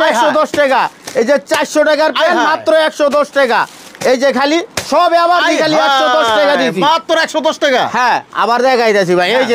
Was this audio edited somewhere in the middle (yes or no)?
no